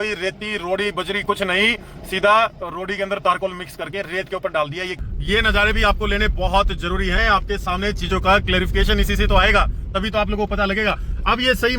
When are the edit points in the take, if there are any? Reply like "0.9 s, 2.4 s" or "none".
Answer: 5.0 s